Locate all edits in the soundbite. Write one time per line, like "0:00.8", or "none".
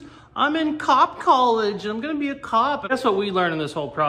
0:02.9